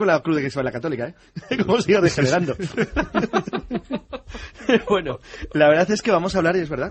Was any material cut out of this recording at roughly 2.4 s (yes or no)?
no